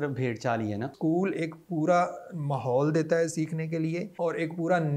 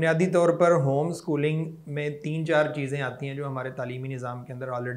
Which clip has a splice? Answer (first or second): first